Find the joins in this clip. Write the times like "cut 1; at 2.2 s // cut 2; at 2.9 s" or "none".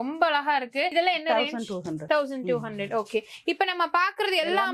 none